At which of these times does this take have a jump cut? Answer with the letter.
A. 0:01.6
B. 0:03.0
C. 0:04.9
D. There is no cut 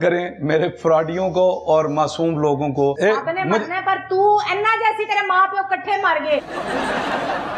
B